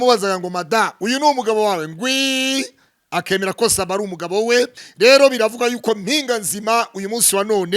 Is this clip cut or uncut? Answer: cut